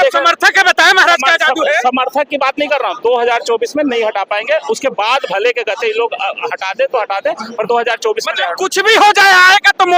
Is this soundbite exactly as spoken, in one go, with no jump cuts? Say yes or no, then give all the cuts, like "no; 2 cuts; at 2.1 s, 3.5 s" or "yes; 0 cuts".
yes; 0 cuts